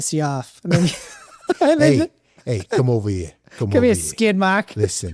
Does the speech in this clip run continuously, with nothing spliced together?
yes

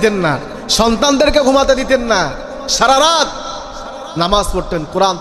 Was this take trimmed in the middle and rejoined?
no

